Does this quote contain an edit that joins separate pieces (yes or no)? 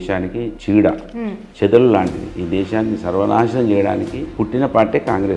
no